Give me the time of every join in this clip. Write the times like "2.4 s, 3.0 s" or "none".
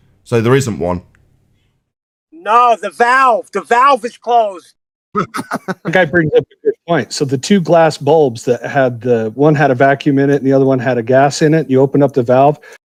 none